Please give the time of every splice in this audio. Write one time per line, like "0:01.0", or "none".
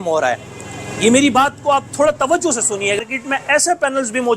0:03.0

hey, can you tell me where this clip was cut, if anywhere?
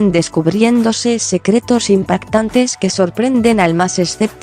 0:03.1

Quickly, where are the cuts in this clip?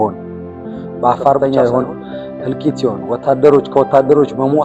0:01.4

